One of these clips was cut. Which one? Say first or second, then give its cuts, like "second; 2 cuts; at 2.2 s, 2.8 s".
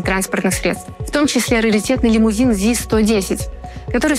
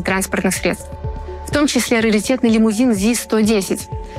first; 1 cut; at 0.9 s